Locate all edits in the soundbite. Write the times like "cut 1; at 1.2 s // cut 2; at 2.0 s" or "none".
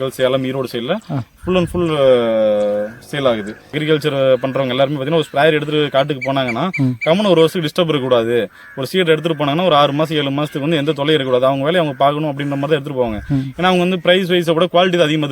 cut 1; at 3.7 s